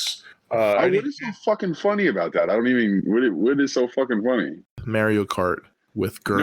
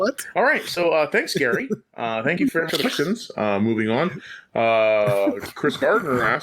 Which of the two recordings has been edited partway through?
first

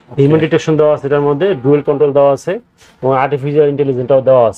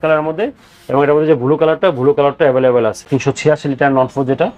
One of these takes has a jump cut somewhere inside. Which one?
second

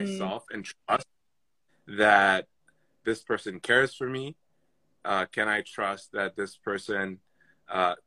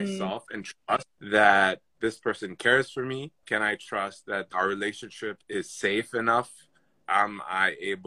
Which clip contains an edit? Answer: second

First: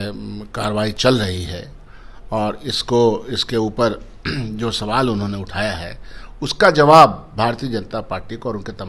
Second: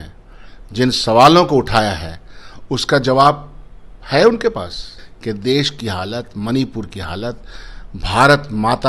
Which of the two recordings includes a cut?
second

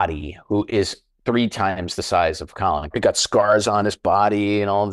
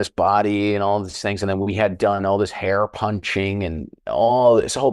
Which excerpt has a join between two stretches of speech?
first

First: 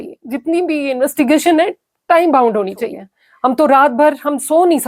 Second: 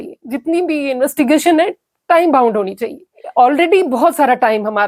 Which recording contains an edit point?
first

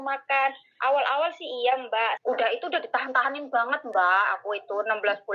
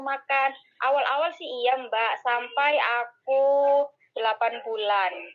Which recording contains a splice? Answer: first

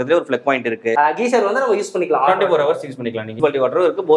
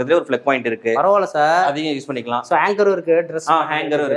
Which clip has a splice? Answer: first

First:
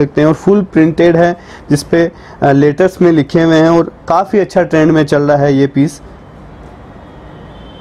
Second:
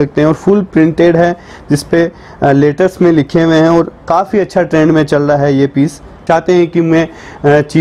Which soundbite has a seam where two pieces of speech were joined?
second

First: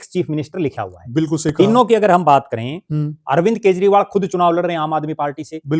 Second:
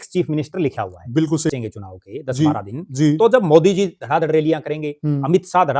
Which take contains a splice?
second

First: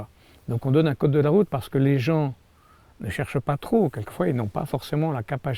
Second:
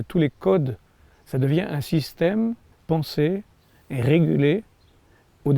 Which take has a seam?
second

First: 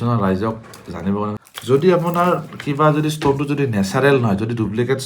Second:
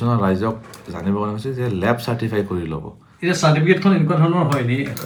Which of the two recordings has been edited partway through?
first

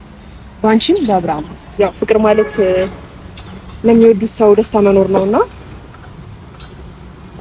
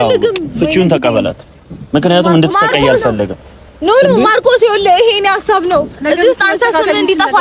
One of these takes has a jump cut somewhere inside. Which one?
first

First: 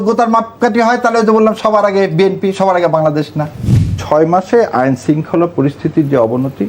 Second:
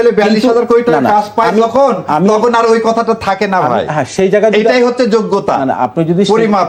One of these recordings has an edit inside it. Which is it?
first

